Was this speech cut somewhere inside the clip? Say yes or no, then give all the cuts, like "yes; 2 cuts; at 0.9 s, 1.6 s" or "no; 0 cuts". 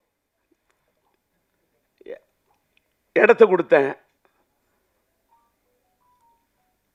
no; 0 cuts